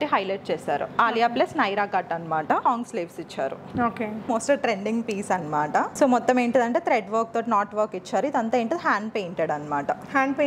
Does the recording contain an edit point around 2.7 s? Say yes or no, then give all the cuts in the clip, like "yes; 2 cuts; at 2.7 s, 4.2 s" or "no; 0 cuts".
yes; 2 cuts; at 2.7 s, 4.3 s